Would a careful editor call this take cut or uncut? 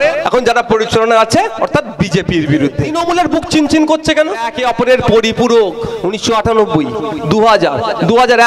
cut